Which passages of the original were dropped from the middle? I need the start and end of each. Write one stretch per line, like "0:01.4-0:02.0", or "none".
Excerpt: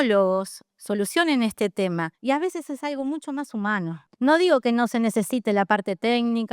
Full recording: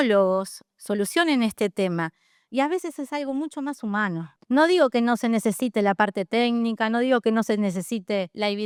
0:02.1-0:02.4